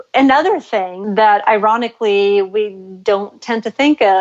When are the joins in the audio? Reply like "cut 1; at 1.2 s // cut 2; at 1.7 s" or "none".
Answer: cut 1; at 1.0 s